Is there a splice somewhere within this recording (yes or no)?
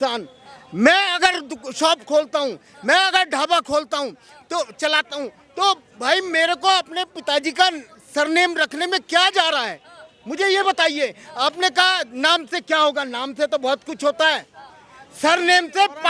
no